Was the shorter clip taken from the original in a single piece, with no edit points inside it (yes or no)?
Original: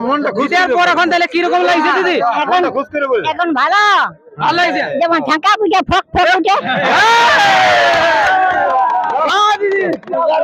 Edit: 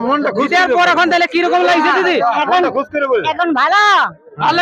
yes